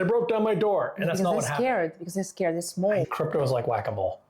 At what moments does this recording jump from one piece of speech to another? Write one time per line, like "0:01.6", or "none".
0:03.1